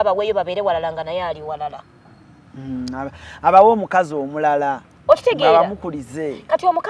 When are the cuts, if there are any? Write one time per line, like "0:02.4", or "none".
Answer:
none